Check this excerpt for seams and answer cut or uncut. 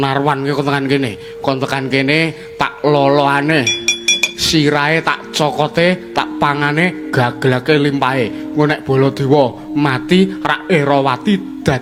uncut